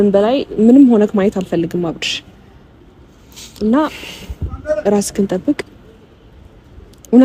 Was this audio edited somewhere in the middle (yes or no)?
no